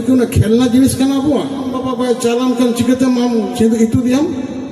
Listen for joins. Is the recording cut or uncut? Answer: cut